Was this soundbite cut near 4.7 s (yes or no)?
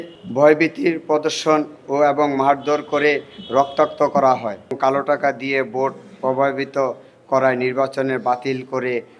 yes